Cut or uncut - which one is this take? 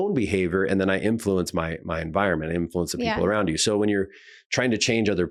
uncut